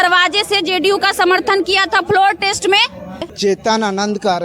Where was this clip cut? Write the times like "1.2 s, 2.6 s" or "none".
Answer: 3.3 s